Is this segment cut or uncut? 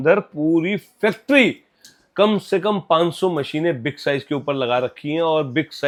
uncut